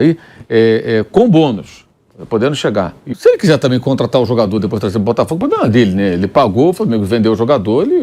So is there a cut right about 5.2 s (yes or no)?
no